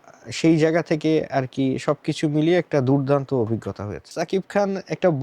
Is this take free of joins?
no; 1 cut; at 4.1 s

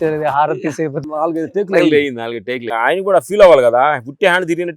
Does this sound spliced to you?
yes; 2 cuts; at 1.0 s, 2.7 s

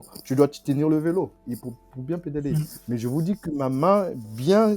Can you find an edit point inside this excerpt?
no; 0 cuts

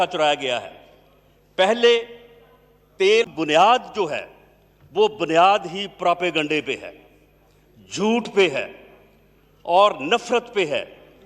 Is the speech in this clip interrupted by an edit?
yes; 1 cut; at 3.3 s

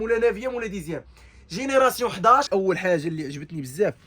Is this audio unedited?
no; 1 cut; at 2.5 s

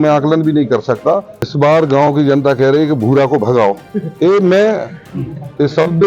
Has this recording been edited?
yes; 1 cut; at 1.4 s

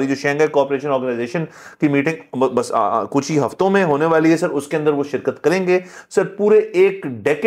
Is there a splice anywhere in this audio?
no; 0 cuts

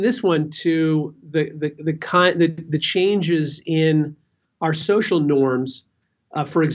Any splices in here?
no; 0 cuts

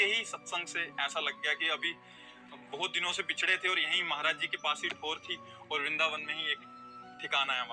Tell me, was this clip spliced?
no; 0 cuts

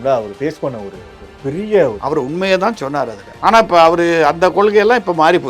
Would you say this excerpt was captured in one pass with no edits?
yes; 0 cuts

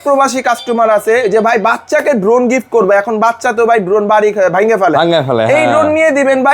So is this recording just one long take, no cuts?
yes; 0 cuts

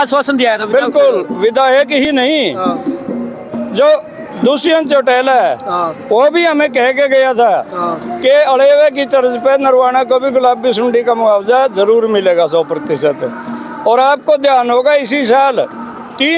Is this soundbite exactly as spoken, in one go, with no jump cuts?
yes; 0 cuts

